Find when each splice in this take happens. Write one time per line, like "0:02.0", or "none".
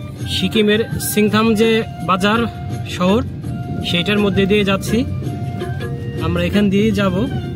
0:05.8